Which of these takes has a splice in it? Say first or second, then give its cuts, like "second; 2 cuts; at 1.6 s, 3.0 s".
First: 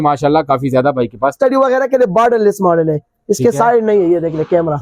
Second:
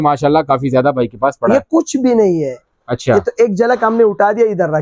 first; 1 cut; at 1.3 s